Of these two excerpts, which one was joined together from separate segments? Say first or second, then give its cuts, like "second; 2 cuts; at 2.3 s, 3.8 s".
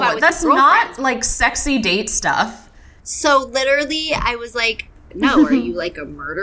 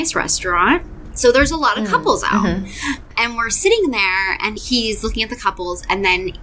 second; 2 cuts; at 1.0 s, 4.6 s